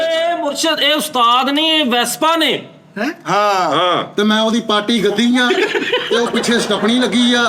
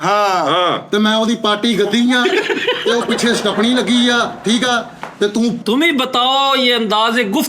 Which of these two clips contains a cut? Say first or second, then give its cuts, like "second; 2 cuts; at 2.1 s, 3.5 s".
second; 1 cut; at 5.6 s